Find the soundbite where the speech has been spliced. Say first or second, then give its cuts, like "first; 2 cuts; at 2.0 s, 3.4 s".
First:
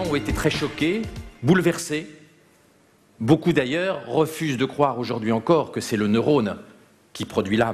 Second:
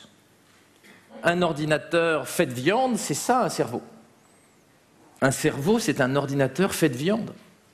second; 1 cut; at 1.1 s